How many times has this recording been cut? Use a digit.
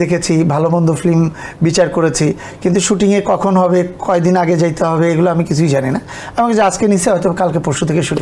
0